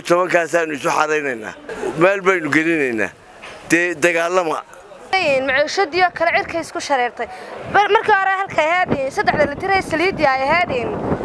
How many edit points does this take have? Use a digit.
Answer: 2